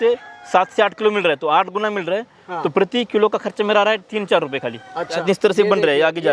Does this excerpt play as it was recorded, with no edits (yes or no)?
no